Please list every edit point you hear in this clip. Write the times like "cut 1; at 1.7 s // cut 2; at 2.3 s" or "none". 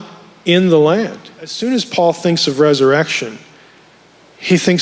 cut 1; at 1.6 s

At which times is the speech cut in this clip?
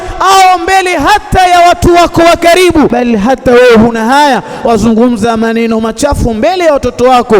cut 1; at 2.9 s

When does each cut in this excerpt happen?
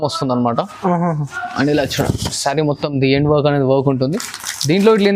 none

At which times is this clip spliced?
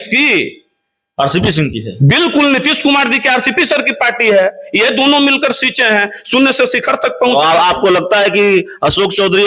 none

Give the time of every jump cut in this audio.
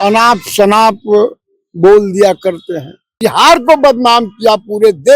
cut 1; at 3.2 s

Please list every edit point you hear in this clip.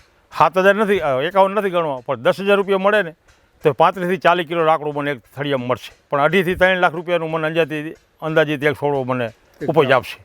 cut 1; at 6.0 s

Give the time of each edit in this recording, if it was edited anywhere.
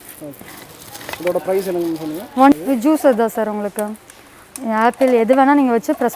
cut 1; at 2.5 s

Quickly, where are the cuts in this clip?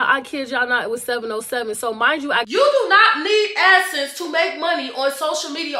cut 1; at 2.5 s

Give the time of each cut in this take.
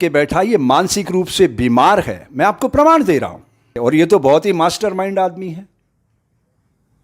cut 1; at 3.7 s

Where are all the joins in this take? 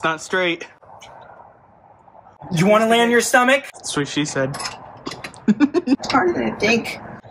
cut 1; at 2.3 s // cut 2; at 6.0 s

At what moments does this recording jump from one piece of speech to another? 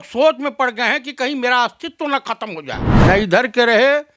cut 1; at 2.8 s

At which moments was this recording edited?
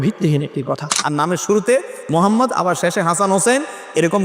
cut 1; at 1.0 s

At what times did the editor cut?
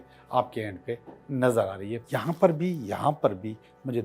cut 1; at 2.0 s

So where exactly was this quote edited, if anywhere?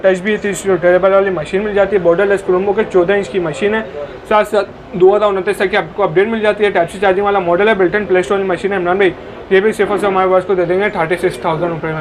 none

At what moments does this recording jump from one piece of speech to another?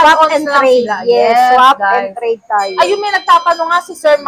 none

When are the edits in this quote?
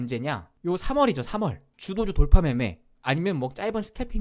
cut 1; at 1.8 s

